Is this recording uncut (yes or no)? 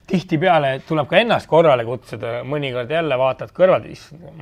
yes